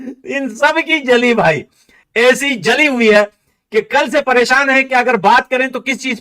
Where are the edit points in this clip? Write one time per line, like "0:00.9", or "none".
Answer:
none